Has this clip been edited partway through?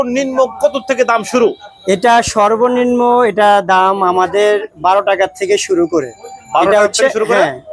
no; 0 cuts

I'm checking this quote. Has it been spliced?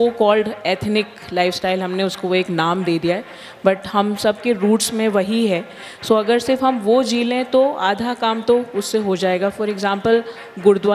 no; 0 cuts

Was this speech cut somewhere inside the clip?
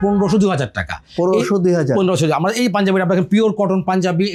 no; 0 cuts

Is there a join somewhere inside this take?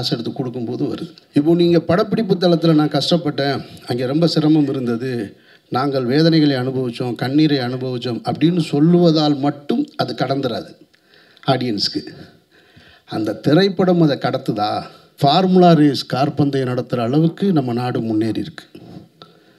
yes; 2 cuts; at 1.1 s, 15.0 s

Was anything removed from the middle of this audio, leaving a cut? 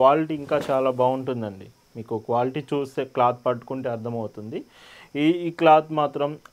no; 0 cuts

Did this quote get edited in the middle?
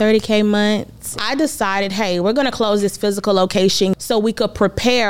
yes; 2 cuts; at 1.2 s, 3.9 s

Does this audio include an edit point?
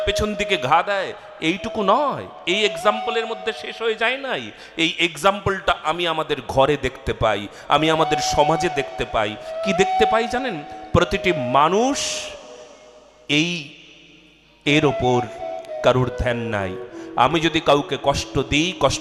no; 0 cuts

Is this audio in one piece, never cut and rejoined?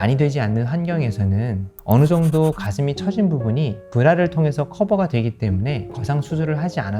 no; 1 cut; at 6.0 s

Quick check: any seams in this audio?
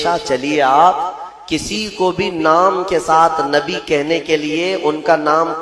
no; 0 cuts

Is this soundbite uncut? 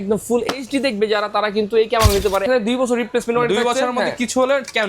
no; 1 cut; at 2.4 s

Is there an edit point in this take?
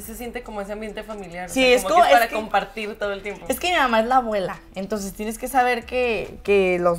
no; 0 cuts

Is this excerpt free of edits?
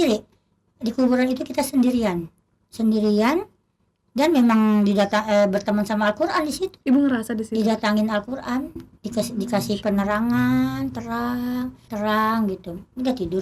yes; 0 cuts

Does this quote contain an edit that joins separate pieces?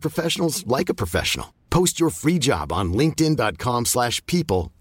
no; 0 cuts

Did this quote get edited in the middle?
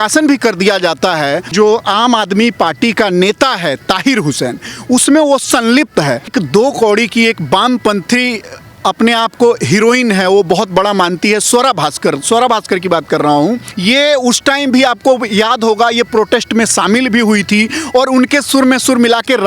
yes; 3 cuts; at 1.5 s, 6.3 s, 13.7 s

